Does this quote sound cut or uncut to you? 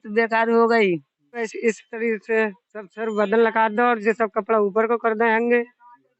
cut